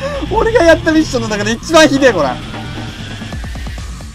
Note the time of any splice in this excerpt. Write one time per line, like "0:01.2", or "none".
0:02.3